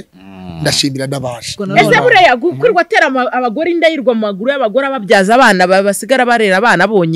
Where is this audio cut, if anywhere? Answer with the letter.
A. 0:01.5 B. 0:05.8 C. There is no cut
A